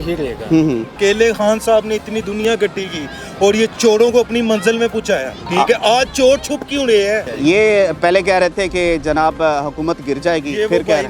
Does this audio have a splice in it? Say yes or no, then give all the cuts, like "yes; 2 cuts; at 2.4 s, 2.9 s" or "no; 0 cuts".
yes; 3 cuts; at 0.9 s, 5.4 s, 7.3 s